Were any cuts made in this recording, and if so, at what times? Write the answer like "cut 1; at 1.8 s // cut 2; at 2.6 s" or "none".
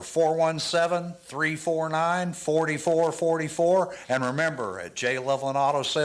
none

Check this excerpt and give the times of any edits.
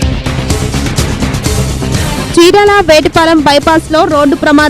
none

